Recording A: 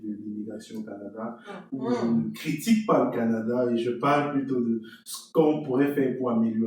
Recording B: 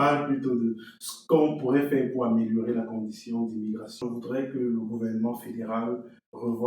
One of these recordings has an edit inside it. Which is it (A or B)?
B